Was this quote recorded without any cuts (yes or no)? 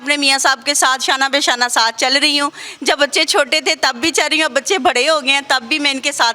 yes